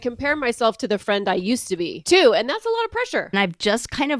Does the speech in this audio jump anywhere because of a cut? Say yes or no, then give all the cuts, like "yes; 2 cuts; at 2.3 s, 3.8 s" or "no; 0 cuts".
yes; 2 cuts; at 2.0 s, 3.4 s